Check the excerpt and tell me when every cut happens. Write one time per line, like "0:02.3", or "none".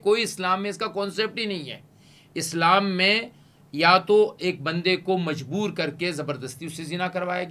none